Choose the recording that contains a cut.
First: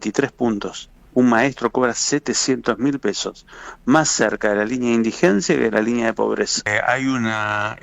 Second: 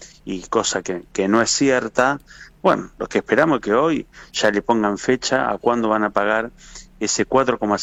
first; 2 cuts; at 0.9 s, 6.6 s

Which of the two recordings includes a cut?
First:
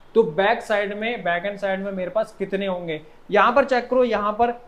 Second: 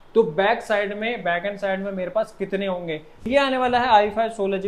second; 1 cut; at 3.3 s

